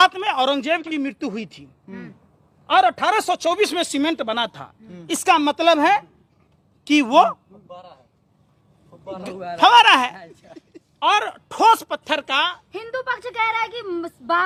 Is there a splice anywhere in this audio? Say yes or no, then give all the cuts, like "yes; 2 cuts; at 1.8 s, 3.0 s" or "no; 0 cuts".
no; 0 cuts